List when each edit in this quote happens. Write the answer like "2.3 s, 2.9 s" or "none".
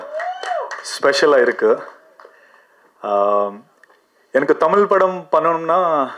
none